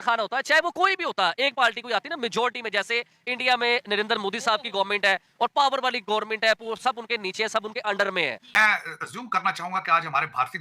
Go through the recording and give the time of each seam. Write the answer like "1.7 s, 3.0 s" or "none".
8.4 s